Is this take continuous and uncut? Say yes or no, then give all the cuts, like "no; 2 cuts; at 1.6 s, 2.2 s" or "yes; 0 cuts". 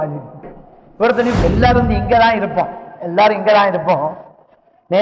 no; 1 cut; at 1.4 s